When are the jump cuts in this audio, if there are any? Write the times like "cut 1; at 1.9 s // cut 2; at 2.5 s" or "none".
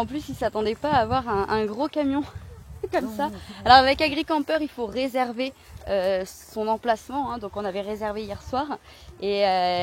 none

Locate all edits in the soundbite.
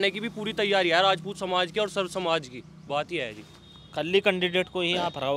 none

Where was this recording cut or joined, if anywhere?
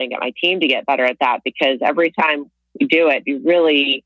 none

